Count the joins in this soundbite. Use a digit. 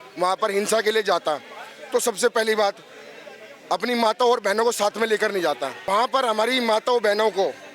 1